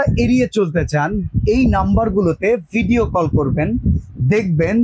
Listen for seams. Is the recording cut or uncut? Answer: uncut